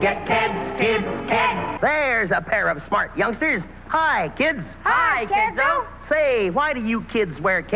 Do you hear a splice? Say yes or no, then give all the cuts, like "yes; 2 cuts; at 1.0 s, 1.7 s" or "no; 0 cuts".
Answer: yes; 1 cut; at 1.7 s